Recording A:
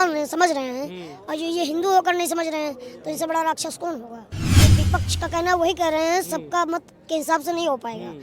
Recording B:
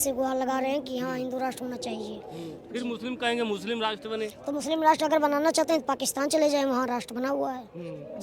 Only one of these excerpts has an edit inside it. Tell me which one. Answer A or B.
A